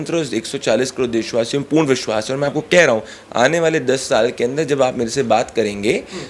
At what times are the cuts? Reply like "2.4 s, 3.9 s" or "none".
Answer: none